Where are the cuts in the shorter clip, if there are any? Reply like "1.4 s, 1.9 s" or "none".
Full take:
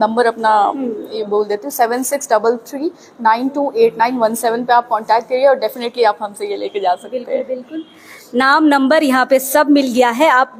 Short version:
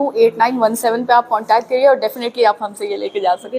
none